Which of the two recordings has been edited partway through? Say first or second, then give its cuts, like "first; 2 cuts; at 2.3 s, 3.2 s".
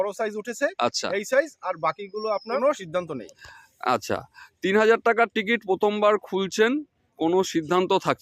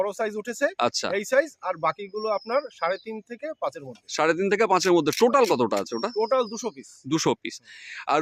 first; 1 cut; at 2.6 s